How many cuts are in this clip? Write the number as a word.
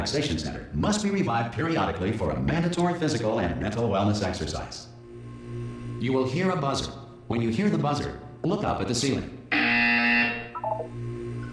zero